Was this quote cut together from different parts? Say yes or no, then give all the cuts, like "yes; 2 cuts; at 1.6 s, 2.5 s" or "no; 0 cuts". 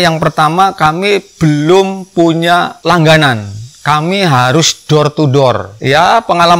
yes; 1 cut; at 2.7 s